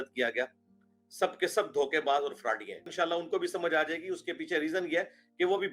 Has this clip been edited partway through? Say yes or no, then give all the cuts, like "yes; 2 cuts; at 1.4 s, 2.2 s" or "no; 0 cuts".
yes; 1 cut; at 2.9 s